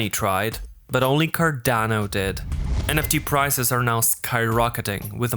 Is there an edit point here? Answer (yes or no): yes